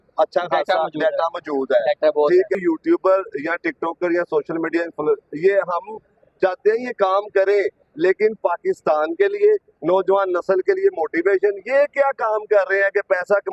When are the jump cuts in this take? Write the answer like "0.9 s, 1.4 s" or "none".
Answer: 2.5 s